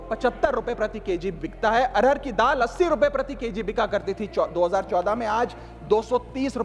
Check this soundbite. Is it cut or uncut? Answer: uncut